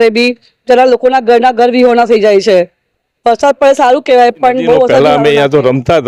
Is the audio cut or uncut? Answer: cut